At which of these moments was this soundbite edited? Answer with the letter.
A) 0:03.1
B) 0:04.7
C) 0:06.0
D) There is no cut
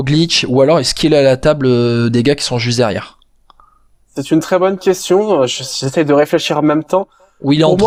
D